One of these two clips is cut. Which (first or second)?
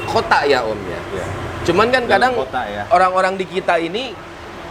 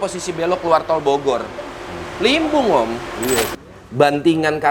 second